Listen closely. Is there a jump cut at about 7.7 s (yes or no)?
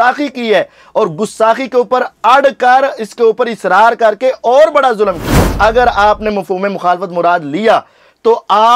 no